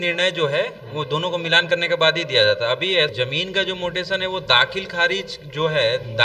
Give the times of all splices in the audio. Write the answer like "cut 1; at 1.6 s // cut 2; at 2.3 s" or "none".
cut 1; at 3.1 s